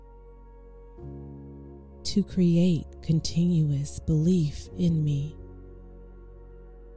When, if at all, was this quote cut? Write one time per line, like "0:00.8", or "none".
0:01.9
0:05.3